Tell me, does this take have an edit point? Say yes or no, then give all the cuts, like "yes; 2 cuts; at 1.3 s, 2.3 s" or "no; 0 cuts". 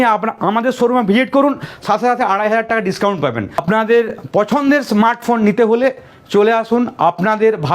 yes; 1 cut; at 3.6 s